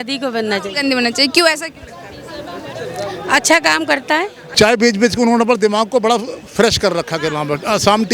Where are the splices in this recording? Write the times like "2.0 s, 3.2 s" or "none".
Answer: 4.4 s